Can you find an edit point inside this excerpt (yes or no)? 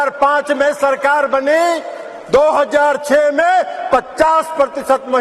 no